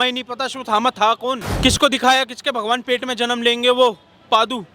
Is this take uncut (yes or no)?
no